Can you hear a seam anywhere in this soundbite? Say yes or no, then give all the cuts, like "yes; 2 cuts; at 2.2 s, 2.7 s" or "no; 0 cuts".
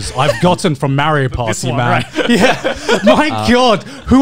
no; 0 cuts